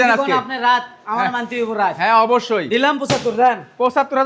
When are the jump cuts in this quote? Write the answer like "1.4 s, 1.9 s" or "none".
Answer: none